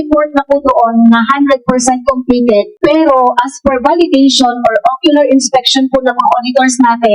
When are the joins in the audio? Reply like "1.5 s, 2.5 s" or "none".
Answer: 2.7 s